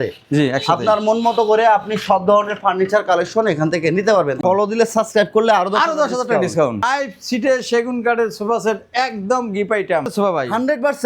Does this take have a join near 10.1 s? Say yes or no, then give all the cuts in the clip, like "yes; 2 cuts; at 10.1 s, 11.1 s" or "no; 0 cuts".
yes; 3 cuts; at 4.4 s, 6.8 s, 10.1 s